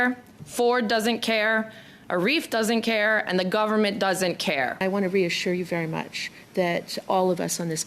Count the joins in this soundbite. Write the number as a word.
one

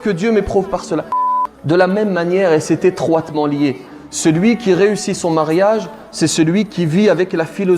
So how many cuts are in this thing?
one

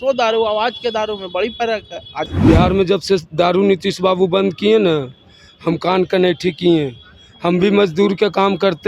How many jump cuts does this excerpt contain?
one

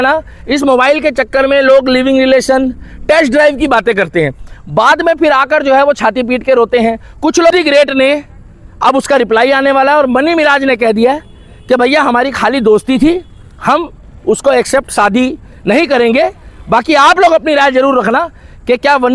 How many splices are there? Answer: one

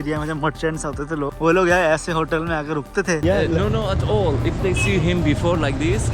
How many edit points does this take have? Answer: two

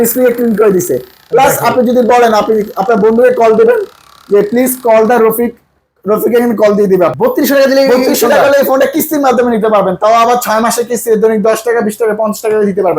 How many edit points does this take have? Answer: one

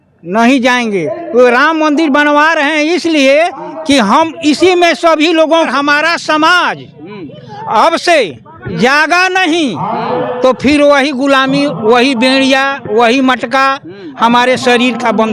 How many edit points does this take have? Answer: one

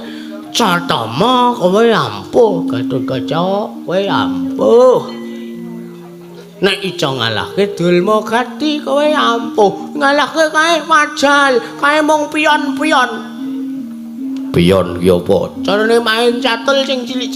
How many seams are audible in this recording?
zero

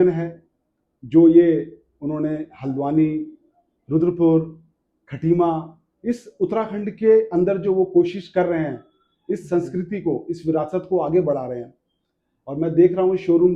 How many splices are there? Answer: zero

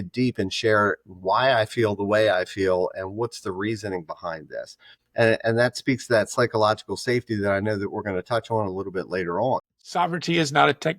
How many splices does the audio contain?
one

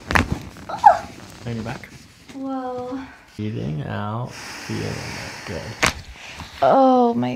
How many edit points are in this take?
one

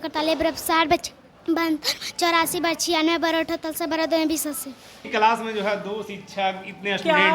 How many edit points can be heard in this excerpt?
one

